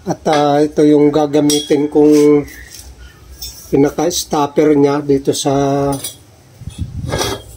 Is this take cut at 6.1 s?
no; 0 cuts

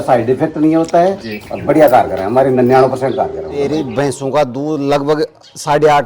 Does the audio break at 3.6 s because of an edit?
yes; 1 cut; at 3.6 s

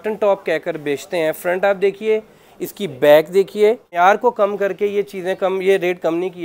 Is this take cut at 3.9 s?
yes; 1 cut; at 3.9 s

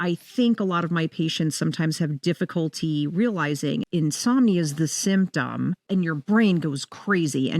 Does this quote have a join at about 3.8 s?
yes; 2 cuts; at 3.8 s, 5.9 s

